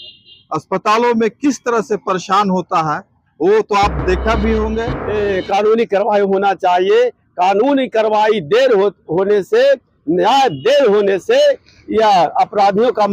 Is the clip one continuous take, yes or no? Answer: no